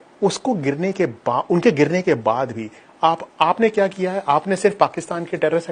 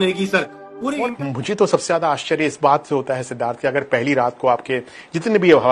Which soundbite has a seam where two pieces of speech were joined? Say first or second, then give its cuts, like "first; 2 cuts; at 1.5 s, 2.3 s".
second; 1 cut; at 1.0 s